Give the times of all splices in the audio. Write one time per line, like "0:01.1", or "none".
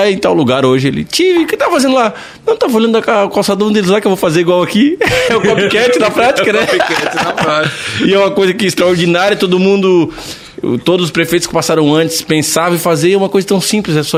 none